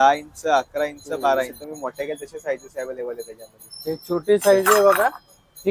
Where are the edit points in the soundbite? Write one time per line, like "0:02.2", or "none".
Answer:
0:01.6